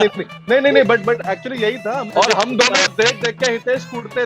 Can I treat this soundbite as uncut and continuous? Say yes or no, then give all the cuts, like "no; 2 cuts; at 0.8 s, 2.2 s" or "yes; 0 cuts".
no; 1 cut; at 2.1 s